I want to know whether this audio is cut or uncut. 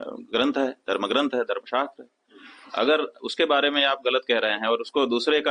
uncut